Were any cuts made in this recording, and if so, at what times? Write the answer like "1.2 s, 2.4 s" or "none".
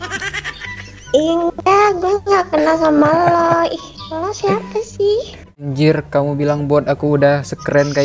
5.7 s